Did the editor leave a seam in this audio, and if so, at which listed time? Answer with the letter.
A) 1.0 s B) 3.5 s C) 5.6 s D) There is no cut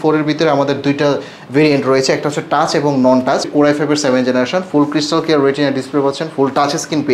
B